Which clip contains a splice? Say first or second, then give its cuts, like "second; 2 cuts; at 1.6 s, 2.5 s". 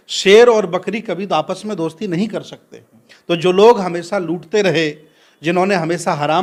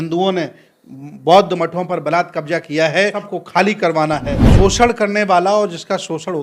second; 2 cuts; at 3.2 s, 4.4 s